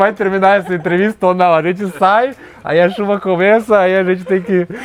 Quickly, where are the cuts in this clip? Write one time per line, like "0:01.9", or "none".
none